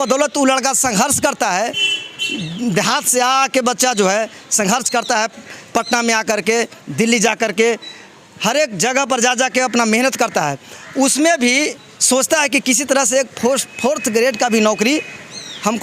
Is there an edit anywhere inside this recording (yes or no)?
no